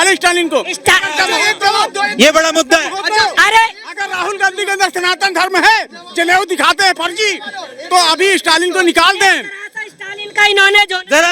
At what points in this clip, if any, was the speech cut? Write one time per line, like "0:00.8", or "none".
none